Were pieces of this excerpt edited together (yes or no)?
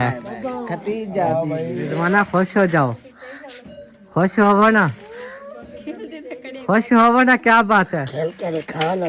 yes